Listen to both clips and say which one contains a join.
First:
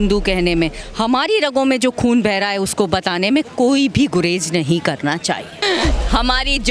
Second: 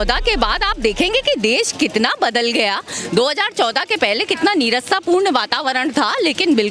first; 1 cut; at 5.6 s

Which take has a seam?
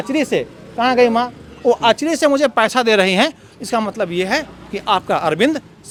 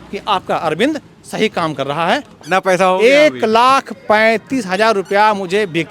second; 1 cut; at 2.3 s

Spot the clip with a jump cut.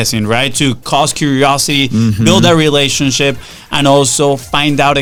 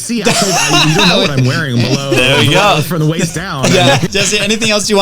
second; 1 cut; at 4.0 s

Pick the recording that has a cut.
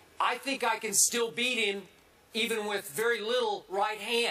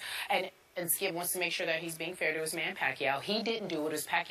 second; 1 cut; at 1.1 s

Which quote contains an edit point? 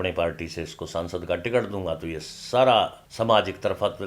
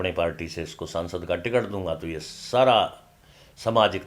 first; 1 cut; at 3.0 s

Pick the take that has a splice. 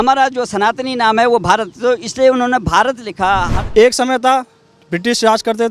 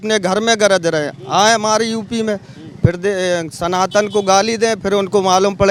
first; 1 cut; at 3.6 s

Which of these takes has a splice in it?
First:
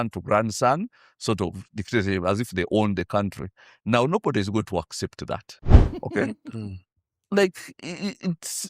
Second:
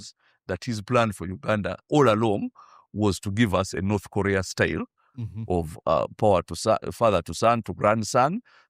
first; 1 cut; at 5.7 s

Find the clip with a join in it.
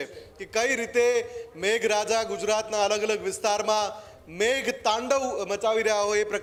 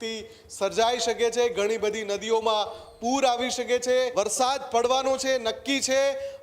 second; 1 cut; at 4.1 s

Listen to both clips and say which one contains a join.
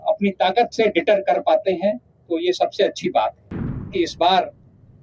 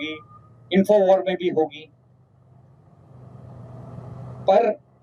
first; 1 cut; at 3.9 s

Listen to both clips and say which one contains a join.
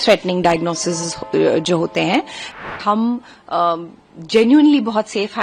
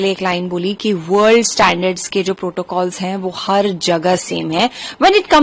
first; 1 cut; at 2.5 s

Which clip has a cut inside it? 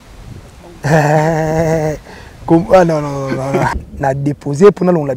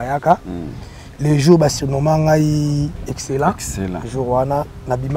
first; 1 cut; at 3.7 s

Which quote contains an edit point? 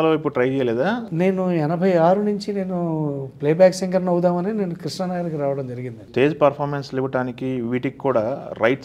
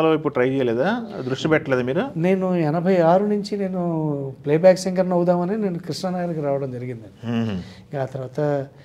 first; 2 cuts; at 1.1 s, 6.1 s

